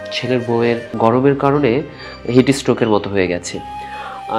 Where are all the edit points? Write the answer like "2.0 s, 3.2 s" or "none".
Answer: 0.9 s

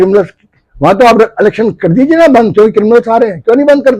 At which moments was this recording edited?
none

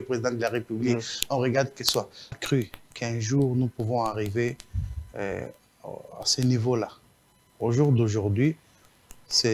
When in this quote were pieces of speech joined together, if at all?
2.4 s

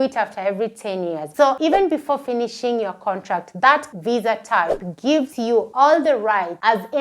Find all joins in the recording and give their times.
1.6 s, 5.5 s

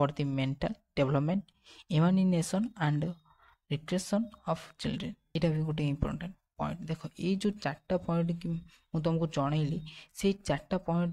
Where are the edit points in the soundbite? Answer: 5.3 s

